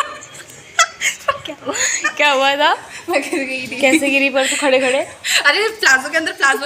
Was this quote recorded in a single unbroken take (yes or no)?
yes